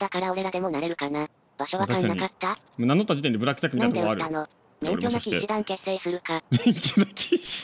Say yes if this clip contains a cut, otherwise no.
yes